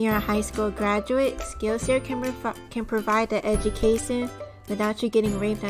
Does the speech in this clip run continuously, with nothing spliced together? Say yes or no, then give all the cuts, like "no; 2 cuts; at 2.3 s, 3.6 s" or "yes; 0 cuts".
no; 2 cuts; at 1.5 s, 4.8 s